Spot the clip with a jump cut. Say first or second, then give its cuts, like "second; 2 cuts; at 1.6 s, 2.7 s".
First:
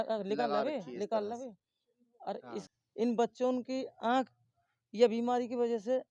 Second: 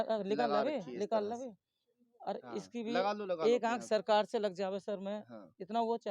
first; 1 cut; at 2.6 s